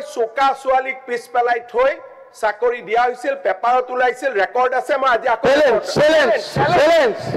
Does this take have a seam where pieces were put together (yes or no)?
no